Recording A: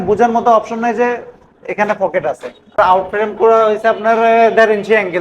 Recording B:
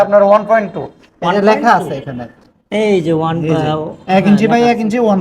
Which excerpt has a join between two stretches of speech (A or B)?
A